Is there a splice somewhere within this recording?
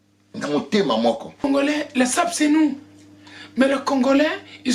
yes; 1 cut; at 1.4 s

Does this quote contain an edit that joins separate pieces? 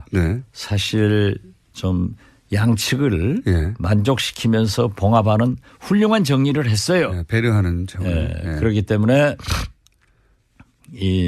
no; 0 cuts

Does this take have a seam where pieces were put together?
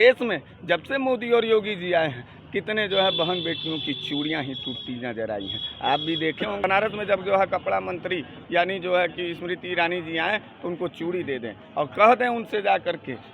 yes; 1 cut; at 6.6 s

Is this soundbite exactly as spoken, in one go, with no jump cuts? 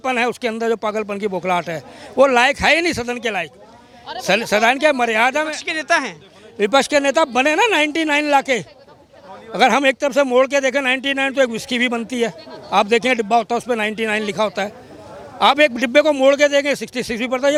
yes; 0 cuts

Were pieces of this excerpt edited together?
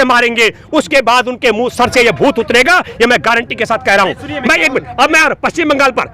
no; 0 cuts

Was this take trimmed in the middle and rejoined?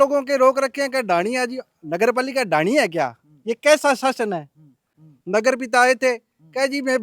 yes; 1 cut; at 5.0 s

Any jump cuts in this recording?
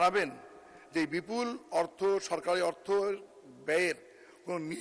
no; 0 cuts

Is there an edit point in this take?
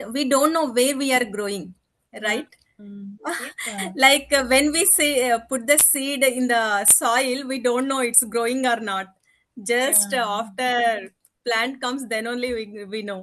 no; 0 cuts

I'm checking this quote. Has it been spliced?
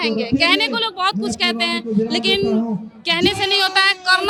no; 0 cuts

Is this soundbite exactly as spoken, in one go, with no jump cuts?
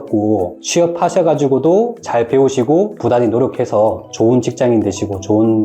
no; 1 cut; at 3.0 s

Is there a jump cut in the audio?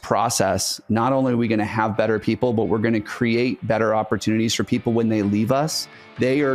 no; 0 cuts

